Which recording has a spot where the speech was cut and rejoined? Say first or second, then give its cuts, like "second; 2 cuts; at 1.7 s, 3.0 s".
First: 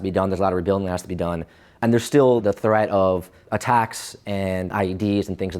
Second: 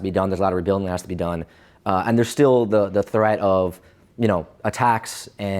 first; 4 cuts; at 1.8 s, 2.4 s, 3.4 s, 4.7 s